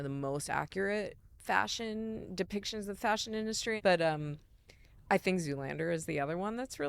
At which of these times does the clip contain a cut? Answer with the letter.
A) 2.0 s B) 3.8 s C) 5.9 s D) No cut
B